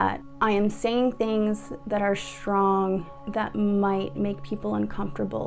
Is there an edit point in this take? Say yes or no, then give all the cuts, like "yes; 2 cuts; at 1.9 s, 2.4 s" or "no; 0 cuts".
no; 0 cuts